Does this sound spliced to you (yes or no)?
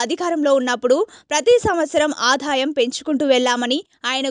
no